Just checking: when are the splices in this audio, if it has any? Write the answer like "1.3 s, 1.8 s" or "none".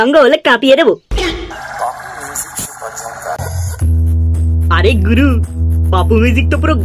1.6 s, 3.4 s